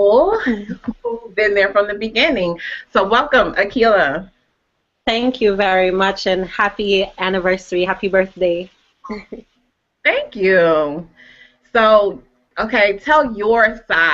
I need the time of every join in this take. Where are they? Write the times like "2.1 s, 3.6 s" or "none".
6.0 s